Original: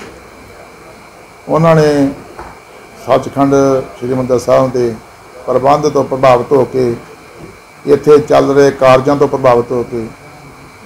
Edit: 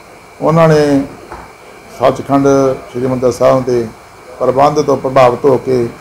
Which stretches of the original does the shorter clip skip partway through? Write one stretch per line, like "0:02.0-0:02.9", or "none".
none

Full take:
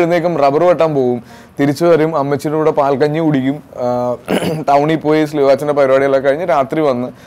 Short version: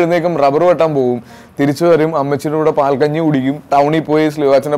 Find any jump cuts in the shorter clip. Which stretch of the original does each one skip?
0:03.6-0:04.6

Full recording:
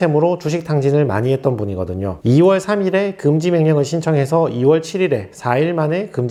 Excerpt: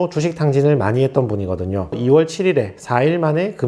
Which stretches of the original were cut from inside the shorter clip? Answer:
0:02.2-0:04.5

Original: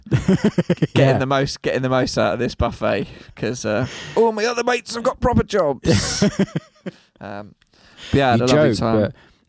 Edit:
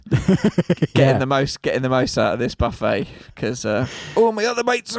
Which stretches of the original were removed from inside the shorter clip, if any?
none

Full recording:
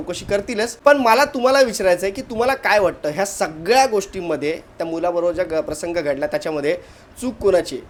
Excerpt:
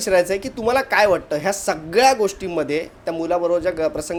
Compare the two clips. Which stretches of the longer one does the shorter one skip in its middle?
none

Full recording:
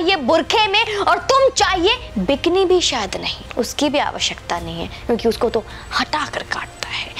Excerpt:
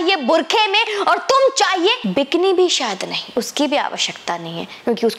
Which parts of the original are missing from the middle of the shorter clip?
0:02.0-0:02.1
0:03.3-0:03.4

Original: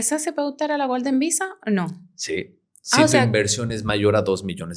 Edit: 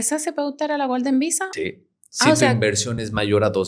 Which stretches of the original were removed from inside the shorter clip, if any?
0:01.5-0:02.2

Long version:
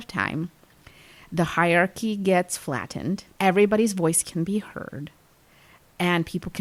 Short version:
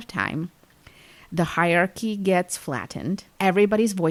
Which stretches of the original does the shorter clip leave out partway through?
none

